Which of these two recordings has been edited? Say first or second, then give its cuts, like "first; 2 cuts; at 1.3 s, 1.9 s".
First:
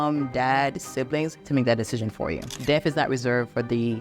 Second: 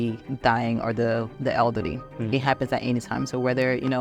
first; 2 cuts; at 1.4 s, 2.5 s